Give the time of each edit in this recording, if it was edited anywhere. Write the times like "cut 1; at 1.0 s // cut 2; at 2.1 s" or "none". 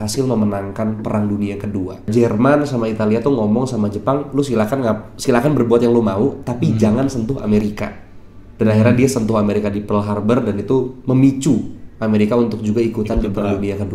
cut 1; at 2.1 s